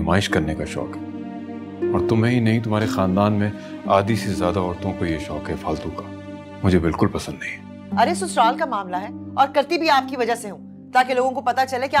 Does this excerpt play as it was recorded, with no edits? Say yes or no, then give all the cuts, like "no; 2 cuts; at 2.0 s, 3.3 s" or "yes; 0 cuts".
no; 1 cut; at 7.8 s